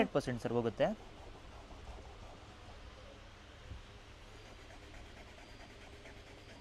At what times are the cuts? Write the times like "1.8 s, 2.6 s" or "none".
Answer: none